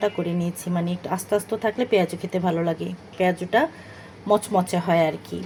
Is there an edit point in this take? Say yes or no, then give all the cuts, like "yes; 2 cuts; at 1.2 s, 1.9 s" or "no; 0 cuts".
no; 0 cuts